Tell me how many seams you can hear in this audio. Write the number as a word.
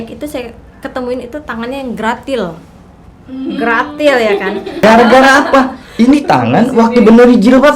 one